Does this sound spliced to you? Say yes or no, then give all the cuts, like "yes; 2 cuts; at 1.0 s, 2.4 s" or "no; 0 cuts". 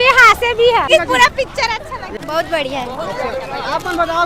yes; 2 cuts; at 0.9 s, 2.2 s